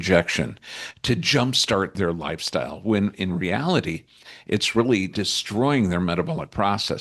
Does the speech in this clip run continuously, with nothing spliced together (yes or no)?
no